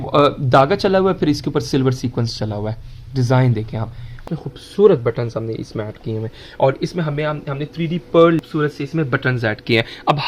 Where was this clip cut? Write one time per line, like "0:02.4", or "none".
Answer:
0:04.2
0:08.4